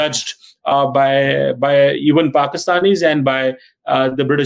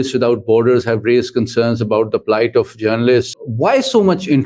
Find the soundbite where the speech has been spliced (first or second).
second